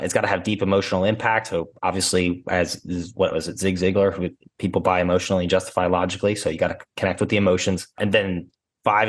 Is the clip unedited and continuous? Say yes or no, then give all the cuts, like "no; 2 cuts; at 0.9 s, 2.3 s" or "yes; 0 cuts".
no; 2 cuts; at 4.4 s, 8.0 s